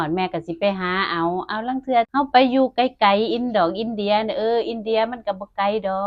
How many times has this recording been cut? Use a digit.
1